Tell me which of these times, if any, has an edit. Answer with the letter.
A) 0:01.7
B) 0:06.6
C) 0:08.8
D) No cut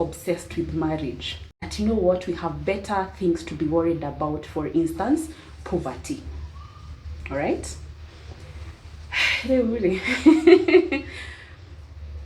A